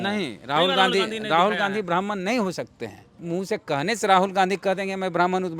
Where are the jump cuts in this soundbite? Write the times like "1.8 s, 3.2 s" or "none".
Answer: 3.2 s